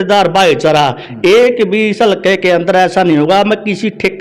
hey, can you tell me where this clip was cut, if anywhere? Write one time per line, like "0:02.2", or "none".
none